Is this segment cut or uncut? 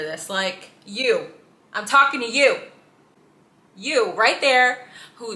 uncut